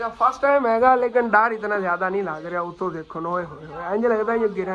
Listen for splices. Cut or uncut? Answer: uncut